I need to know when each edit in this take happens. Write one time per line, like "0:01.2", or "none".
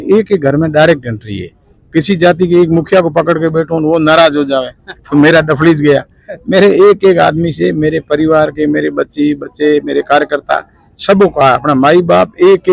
none